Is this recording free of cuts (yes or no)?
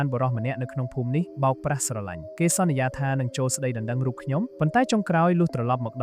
no